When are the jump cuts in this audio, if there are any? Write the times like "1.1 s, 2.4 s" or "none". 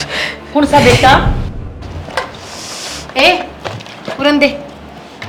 1.5 s